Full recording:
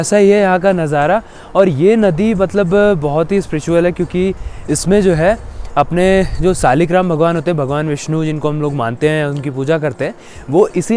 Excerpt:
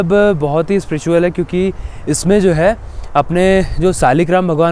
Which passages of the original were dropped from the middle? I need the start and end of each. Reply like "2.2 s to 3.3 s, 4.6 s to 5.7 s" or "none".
none

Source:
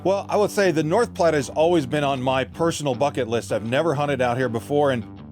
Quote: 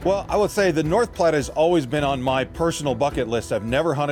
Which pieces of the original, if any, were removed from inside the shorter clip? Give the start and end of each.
none

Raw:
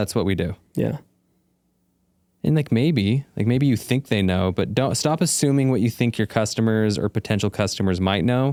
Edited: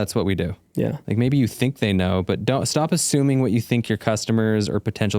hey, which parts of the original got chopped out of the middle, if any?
1.0 s to 3.3 s

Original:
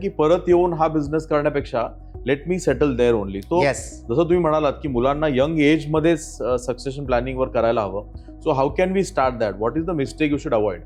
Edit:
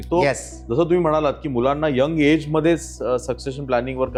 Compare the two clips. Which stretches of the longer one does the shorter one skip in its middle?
none

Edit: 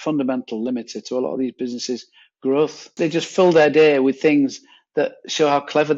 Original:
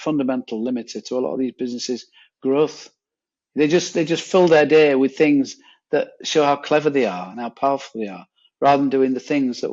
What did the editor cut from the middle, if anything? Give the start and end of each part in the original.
2.9 s to 3.9 s

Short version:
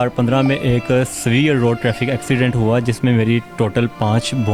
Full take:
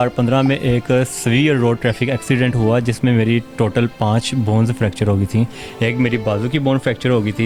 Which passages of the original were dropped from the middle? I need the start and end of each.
none

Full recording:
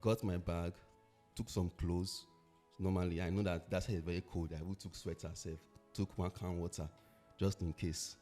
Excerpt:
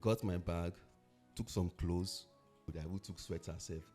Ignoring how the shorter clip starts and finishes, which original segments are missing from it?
2.7 s to 4.5 s

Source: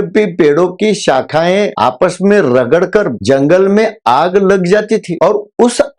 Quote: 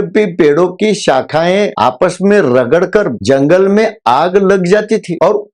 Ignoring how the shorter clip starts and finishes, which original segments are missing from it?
none

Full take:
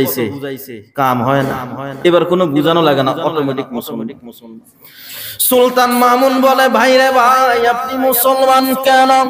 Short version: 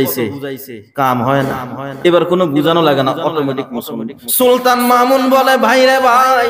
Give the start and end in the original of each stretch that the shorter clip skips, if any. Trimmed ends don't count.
4.2 s to 5.3 s

